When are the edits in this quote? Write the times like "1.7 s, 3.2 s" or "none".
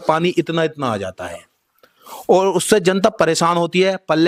none